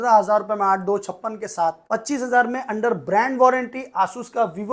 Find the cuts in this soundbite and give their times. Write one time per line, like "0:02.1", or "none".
0:01.8